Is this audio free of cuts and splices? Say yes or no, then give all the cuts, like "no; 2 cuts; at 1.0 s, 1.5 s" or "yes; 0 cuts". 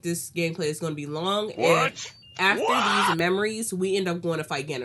yes; 0 cuts